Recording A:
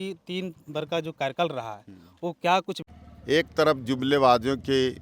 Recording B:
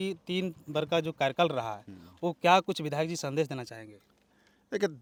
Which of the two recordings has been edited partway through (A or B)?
A